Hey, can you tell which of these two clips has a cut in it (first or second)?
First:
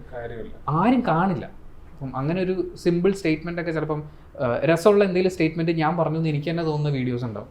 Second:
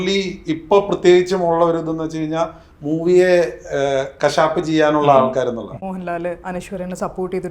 second